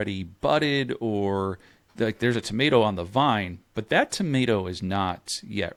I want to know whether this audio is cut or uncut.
uncut